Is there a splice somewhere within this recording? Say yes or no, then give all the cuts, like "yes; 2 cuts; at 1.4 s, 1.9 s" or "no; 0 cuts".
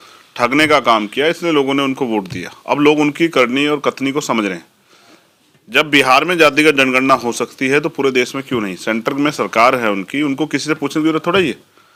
no; 0 cuts